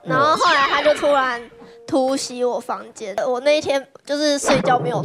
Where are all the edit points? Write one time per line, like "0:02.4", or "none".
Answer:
0:03.2